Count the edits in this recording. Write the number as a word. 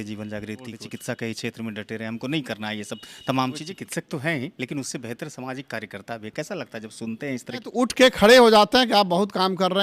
three